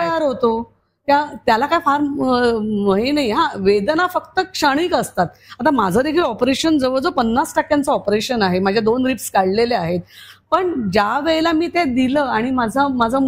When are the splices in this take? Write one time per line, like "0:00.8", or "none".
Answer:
none